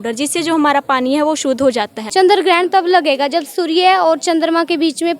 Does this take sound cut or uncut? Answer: cut